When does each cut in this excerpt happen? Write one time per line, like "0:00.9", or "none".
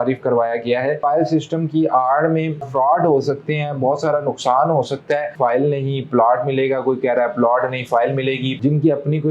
0:01.0
0:02.7
0:05.3
0:08.5

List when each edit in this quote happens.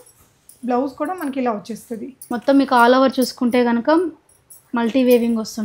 0:02.3

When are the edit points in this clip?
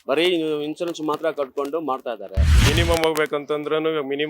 0:02.5

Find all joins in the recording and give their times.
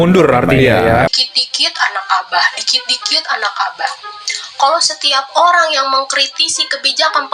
0:01.1

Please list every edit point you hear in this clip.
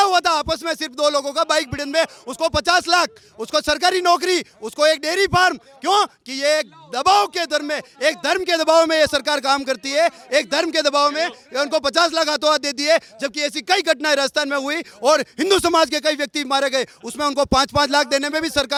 none

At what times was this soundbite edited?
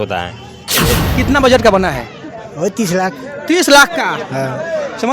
0:01.0

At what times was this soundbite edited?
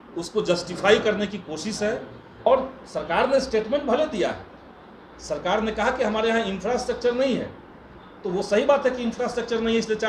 0:02.5

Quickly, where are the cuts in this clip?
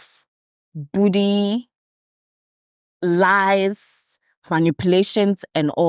none

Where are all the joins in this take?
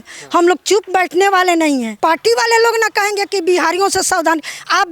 0:01.9

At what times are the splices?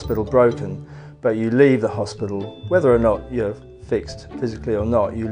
0:04.3

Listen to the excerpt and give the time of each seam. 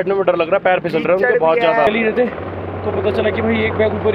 0:01.9

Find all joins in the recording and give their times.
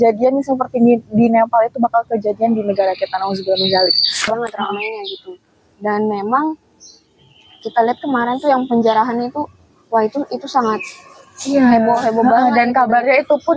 0:04.3

